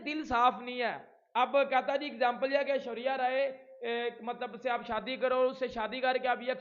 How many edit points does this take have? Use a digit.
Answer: 0